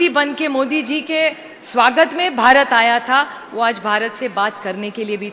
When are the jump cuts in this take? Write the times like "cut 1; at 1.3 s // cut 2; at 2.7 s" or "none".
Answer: none